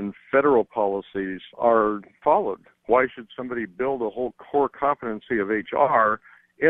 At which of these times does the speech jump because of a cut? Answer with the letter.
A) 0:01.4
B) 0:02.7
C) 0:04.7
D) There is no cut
B